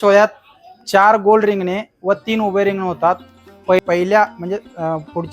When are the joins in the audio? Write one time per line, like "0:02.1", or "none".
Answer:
0:03.8